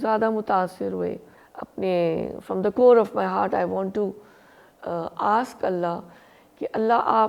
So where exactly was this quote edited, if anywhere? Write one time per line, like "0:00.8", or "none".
0:01.3